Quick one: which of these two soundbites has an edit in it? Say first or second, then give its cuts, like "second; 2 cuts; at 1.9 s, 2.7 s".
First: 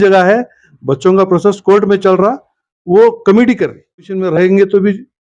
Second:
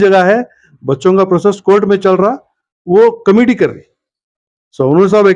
first; 1 cut; at 4.2 s